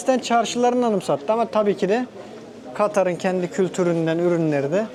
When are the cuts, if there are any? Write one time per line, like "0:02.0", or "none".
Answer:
none